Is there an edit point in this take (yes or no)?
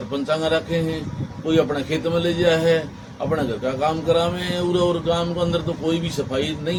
no